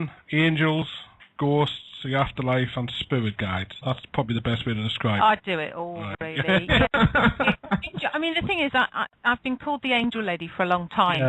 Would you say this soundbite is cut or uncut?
cut